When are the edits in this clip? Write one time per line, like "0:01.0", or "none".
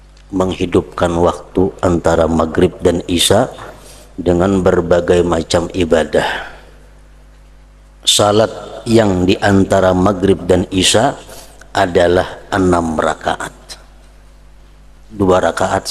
0:07.7
0:14.9